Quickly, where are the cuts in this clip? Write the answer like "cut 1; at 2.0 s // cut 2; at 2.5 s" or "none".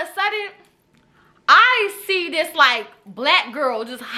none